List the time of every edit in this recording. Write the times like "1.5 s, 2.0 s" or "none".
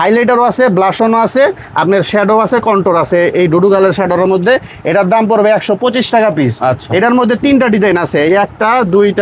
none